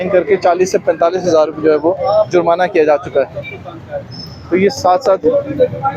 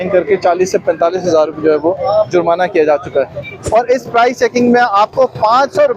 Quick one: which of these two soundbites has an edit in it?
second; 1 cut; at 3.5 s

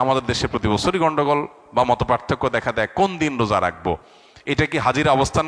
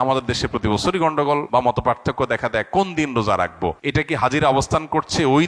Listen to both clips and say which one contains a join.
second; 2 cuts; at 1.5 s, 3.8 s

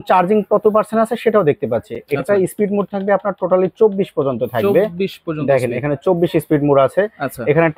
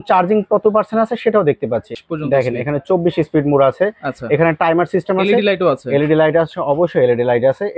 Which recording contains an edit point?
second; 1 cut; at 2.0 s

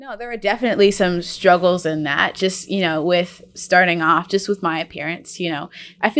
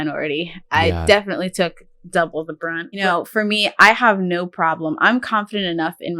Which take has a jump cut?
second; 1 cut; at 3.0 s

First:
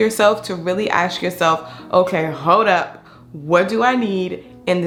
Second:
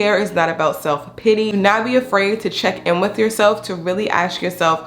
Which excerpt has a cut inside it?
second; 1 cut; at 1.5 s

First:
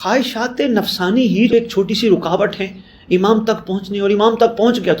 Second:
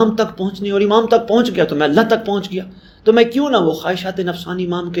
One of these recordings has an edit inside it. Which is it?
first; 1 cut; at 1.5 s

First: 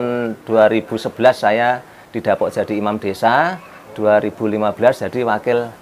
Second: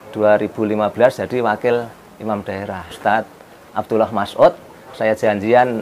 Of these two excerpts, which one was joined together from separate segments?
second; 1 cut; at 3.0 s

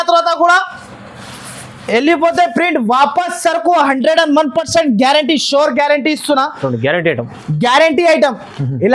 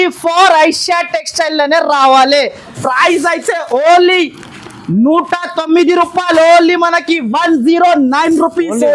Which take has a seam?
second; 1 cut; at 2.8 s

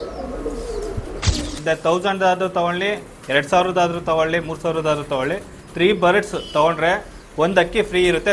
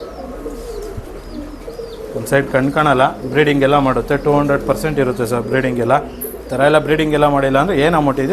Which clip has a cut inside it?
first; 1 cut; at 1.6 s

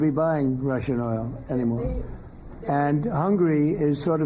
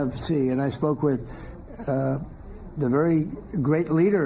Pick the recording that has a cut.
first; 1 cut; at 2.7 s

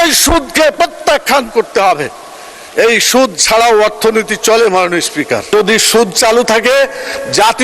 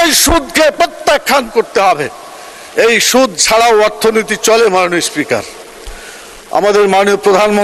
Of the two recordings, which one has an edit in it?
first; 1 cut; at 5.5 s

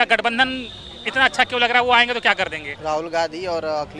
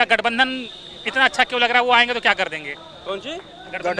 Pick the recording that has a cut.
first; 1 cut; at 2.7 s

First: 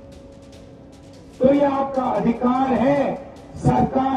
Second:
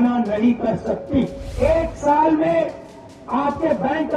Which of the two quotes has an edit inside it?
second; 1 cut; at 1.4 s

